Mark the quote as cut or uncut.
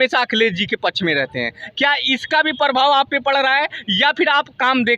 uncut